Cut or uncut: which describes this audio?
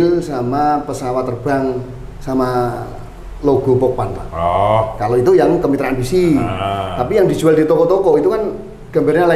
uncut